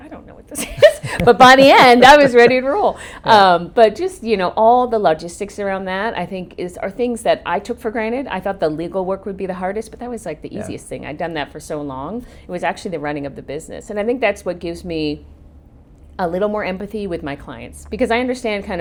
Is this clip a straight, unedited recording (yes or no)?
yes